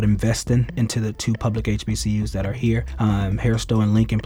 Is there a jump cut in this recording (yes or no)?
yes